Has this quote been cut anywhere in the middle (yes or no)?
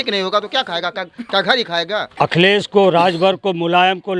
yes